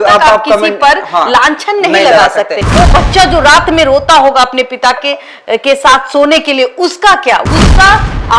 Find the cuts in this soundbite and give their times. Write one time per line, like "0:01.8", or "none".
0:02.6
0:07.4